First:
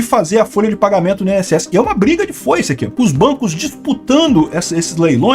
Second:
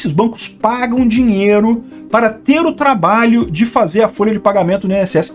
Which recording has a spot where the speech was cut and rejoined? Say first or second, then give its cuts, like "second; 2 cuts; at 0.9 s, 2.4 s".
first; 1 cut; at 2.8 s